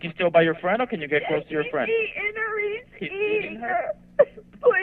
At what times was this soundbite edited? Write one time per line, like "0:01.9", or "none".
none